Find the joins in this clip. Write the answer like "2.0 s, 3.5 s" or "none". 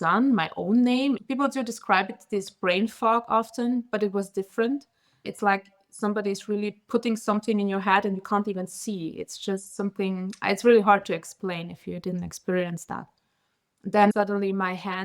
1.2 s, 5.3 s, 14.1 s